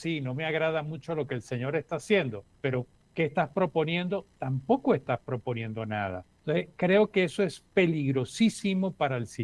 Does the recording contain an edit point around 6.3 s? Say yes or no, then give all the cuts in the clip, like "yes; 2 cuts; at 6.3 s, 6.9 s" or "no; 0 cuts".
yes; 2 cuts; at 2.8 s, 6.3 s